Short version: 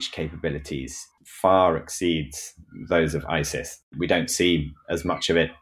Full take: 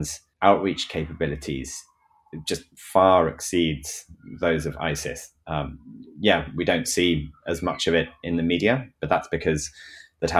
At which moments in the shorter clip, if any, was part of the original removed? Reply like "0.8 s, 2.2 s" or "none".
1.2 s, 3.9 s